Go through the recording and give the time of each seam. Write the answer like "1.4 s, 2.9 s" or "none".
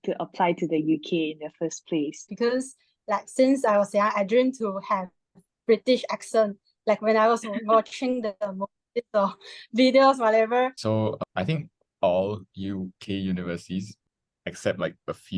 2.2 s, 11.0 s, 13.9 s